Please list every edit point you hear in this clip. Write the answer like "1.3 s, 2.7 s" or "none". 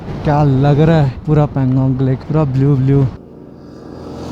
1.2 s, 2.2 s, 3.2 s